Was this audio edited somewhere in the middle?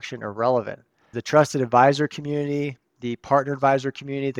yes; 1 cut; at 1.2 s

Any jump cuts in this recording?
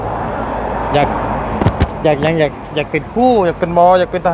no; 0 cuts

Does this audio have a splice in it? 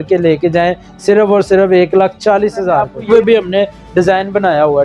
yes; 1 cut; at 3.1 s

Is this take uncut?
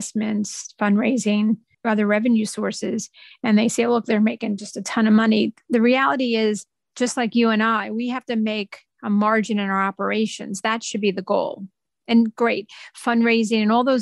yes; 0 cuts

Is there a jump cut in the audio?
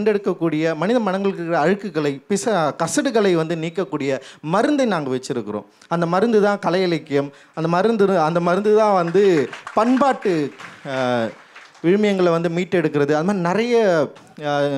no; 0 cuts

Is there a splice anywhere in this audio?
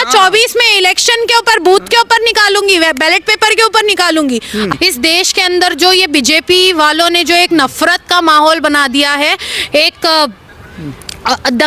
yes; 1 cut; at 4.7 s

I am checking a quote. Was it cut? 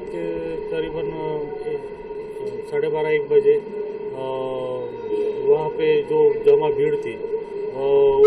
no; 0 cuts

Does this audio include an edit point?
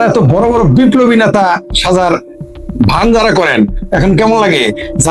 no; 0 cuts

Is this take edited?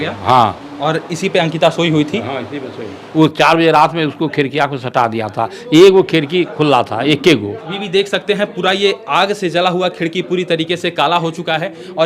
yes; 2 cuts; at 3.0 s, 7.6 s

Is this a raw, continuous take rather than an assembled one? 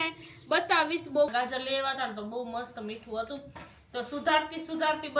no; 1 cut; at 1.3 s

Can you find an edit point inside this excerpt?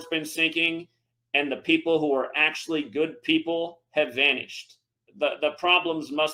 no; 0 cuts

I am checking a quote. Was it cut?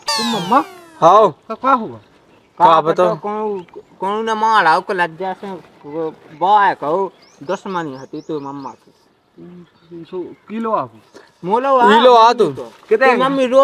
no; 0 cuts

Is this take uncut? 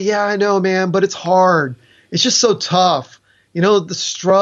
yes; 0 cuts

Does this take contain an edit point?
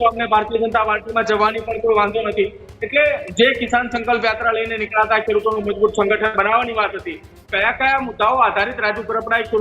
no; 0 cuts

